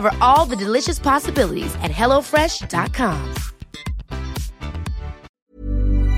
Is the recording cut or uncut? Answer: cut